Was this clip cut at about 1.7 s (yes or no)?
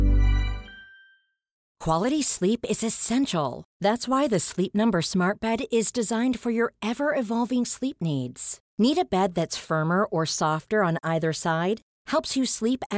yes